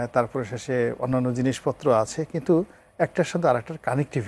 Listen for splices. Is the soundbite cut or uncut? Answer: uncut